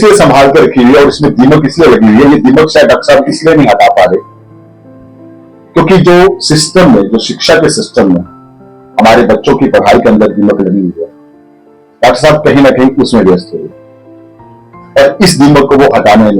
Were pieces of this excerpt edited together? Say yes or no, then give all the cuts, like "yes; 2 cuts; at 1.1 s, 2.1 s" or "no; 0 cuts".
no; 0 cuts